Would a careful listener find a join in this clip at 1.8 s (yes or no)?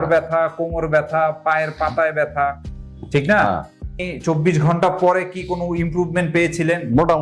no